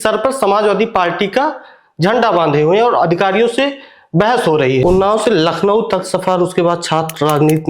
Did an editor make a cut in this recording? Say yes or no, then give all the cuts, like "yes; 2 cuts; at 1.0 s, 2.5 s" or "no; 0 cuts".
yes; 1 cut; at 4.8 s